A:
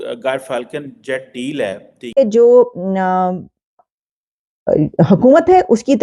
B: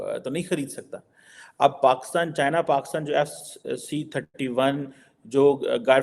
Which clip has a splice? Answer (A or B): A